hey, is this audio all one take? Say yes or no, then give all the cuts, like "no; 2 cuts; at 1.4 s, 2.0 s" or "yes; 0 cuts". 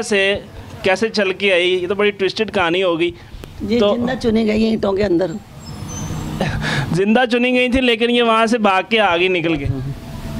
yes; 0 cuts